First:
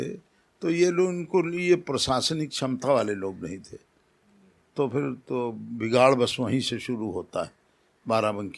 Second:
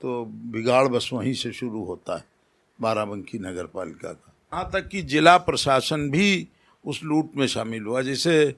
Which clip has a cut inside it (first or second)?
second